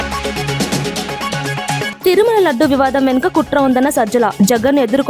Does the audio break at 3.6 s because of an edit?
no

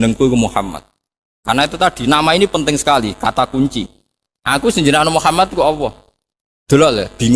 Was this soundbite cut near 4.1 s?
yes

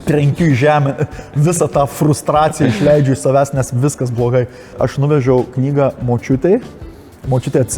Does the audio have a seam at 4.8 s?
yes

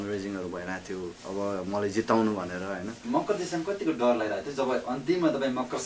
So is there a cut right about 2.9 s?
yes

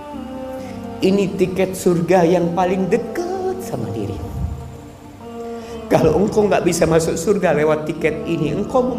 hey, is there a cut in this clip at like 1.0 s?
yes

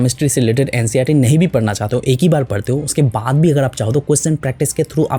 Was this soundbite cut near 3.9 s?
no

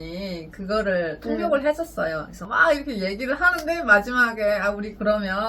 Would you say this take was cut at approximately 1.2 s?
no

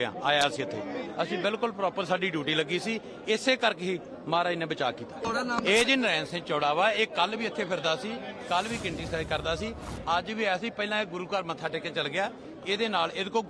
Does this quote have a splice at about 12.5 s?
yes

